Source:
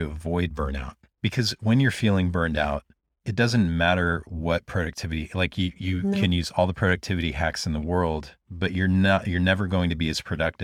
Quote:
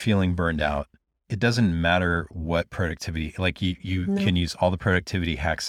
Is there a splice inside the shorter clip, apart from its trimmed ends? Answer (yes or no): no